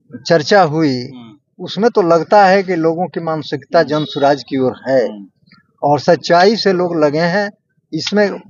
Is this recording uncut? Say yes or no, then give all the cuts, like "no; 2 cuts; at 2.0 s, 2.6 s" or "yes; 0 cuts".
yes; 0 cuts